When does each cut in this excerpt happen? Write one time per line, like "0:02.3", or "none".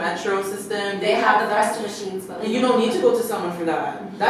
none

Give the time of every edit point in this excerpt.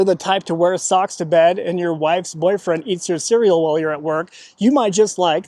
none

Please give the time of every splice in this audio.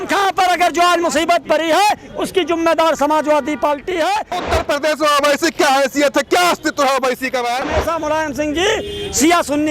0:04.4
0:07.7

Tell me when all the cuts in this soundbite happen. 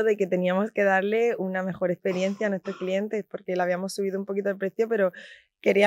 none

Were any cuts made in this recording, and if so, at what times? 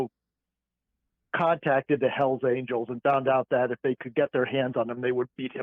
none

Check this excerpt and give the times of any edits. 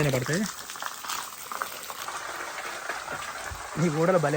0:02.0

